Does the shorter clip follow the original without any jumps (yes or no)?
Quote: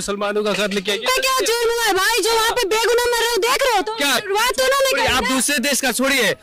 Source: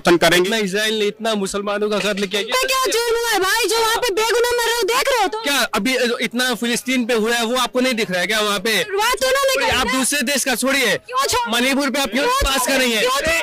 no